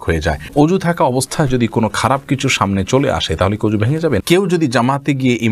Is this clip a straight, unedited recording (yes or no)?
no